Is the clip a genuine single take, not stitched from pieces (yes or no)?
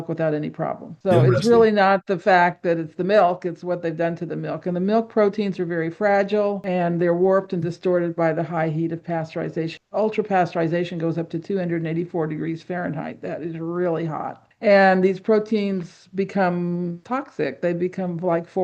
no